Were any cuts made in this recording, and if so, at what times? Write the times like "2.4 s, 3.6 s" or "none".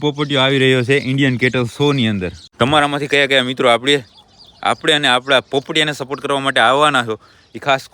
2.4 s